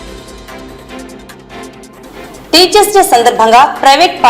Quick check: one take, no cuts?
no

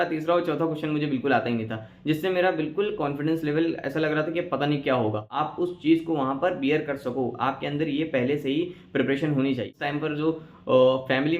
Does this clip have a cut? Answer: yes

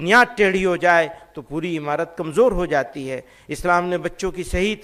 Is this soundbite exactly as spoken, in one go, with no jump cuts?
yes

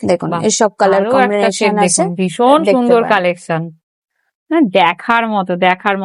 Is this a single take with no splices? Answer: yes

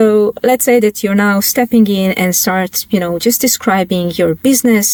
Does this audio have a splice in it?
no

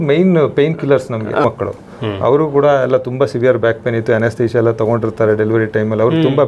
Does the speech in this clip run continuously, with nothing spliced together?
no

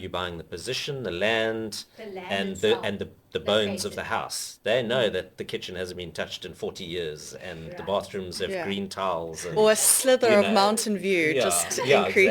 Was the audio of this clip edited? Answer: no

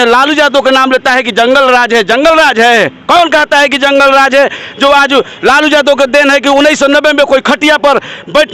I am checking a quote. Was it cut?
no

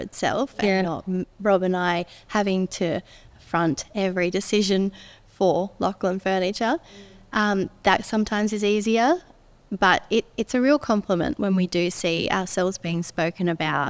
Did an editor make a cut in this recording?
no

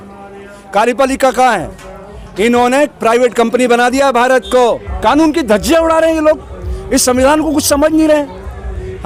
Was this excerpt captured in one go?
yes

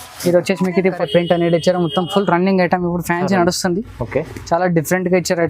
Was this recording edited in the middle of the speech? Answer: yes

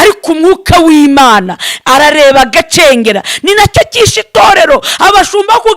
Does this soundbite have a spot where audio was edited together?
no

